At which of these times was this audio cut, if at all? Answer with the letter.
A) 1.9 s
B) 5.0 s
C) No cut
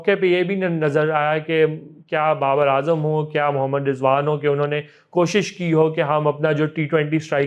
C